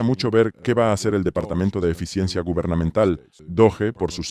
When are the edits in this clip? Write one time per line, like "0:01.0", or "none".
0:03.3